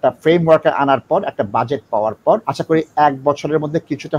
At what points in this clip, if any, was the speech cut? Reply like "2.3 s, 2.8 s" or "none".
2.5 s